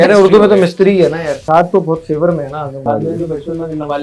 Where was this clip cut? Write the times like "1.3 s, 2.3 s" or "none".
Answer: 1.3 s, 2.9 s